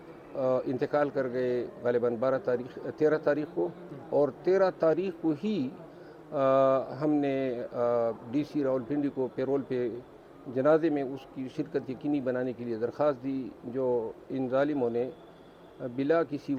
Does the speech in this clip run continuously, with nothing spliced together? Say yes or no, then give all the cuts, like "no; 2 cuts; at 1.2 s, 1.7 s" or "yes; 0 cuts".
yes; 0 cuts